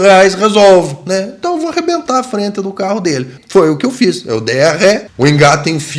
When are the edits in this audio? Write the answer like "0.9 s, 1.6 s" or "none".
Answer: 3.4 s, 5.1 s